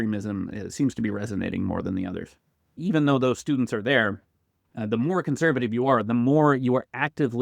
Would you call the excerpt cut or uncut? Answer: cut